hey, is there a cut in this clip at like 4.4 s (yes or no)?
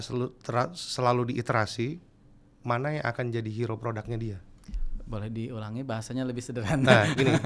no